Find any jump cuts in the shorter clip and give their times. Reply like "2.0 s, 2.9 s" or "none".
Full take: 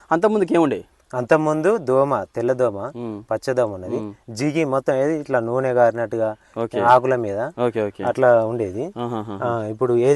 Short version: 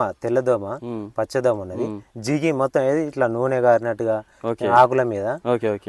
none